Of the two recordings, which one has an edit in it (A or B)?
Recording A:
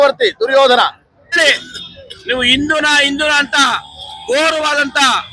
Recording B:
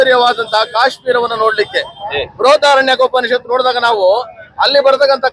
A